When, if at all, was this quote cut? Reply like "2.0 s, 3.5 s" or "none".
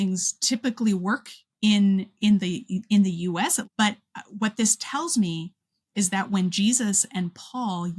3.6 s